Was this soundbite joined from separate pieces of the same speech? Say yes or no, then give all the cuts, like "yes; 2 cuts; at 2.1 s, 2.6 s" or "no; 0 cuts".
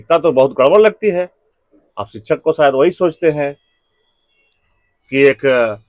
no; 0 cuts